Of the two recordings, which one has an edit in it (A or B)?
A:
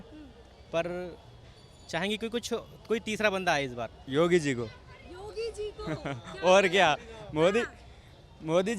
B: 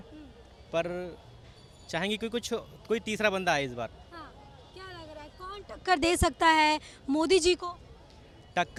A